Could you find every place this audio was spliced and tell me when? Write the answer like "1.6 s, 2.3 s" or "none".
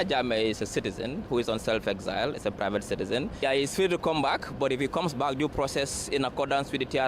3.4 s

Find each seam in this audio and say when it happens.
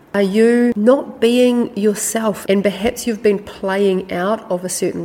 0.8 s, 2.4 s

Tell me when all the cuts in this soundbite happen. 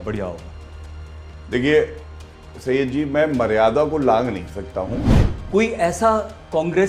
5.0 s

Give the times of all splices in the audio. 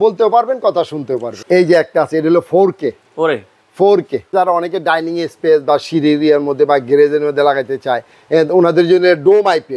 1.3 s, 4.3 s

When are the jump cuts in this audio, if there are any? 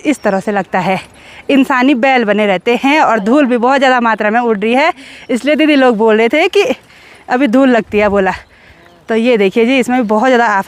none

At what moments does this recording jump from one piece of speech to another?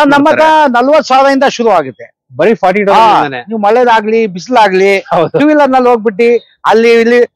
none

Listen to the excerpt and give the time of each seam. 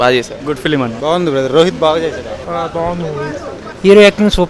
3.6 s

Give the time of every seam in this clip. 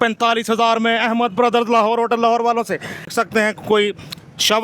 3.1 s

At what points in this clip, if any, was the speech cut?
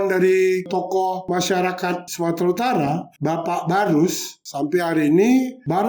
1.2 s, 2.1 s

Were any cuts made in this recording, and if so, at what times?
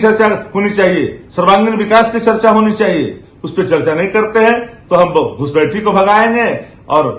1.2 s

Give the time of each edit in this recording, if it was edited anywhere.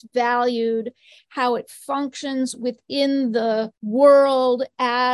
3.8 s

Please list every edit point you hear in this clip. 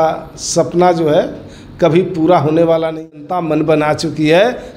3.1 s

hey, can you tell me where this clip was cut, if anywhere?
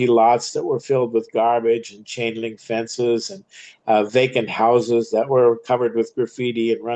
none

